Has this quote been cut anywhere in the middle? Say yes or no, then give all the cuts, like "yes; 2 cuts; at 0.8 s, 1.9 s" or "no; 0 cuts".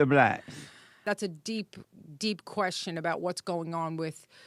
yes; 1 cut; at 1.0 s